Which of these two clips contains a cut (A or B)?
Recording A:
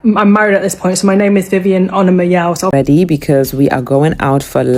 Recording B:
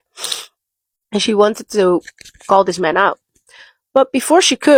A